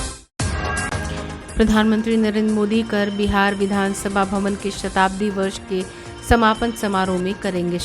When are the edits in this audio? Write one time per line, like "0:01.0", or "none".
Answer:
0:00.9